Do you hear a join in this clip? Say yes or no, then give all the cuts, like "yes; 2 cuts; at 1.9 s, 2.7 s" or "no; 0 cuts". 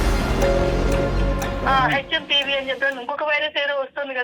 yes; 1 cut; at 1.6 s